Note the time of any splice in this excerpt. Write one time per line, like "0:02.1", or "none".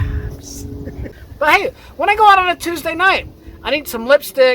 0:01.1